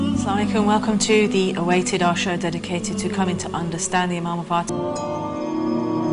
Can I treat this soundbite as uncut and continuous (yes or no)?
yes